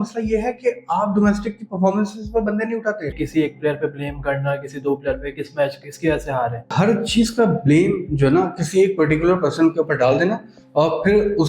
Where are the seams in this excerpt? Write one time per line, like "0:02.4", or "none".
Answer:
0:03.2
0:06.7